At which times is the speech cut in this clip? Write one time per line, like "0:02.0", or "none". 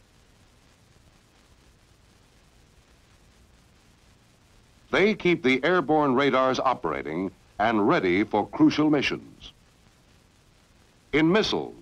0:02.8